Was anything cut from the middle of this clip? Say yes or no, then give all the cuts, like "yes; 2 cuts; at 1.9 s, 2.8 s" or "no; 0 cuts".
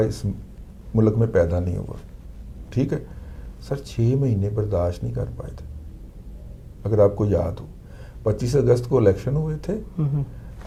no; 0 cuts